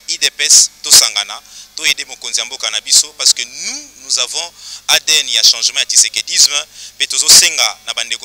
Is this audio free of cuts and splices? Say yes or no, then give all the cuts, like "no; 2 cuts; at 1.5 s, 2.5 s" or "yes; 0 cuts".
yes; 0 cuts